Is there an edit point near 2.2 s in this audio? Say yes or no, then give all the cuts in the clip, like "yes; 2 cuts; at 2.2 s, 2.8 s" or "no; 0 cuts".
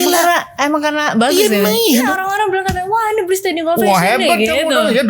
yes; 1 cut; at 2.2 s